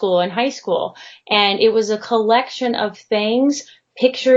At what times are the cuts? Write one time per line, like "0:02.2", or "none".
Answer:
none